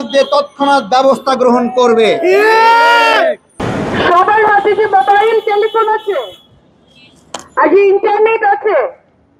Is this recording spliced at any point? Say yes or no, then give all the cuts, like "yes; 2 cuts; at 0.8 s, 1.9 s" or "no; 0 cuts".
yes; 1 cut; at 3.5 s